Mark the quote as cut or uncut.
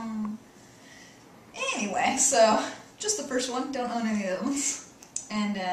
cut